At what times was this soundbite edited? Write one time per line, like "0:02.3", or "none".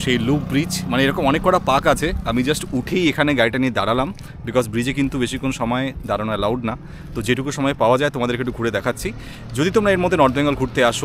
none